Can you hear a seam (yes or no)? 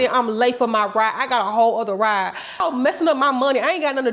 yes